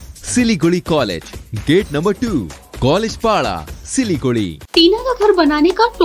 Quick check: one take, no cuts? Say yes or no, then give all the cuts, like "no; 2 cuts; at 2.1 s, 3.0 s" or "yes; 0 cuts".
no; 1 cut; at 4.6 s